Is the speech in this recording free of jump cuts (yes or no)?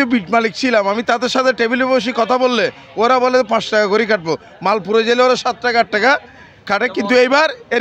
yes